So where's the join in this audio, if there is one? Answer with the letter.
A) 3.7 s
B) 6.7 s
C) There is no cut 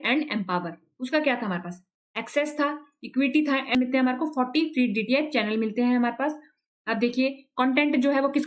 A